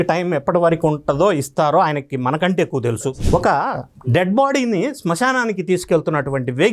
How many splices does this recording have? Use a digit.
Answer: 1